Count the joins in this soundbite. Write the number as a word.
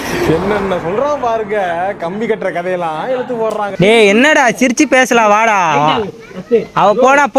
one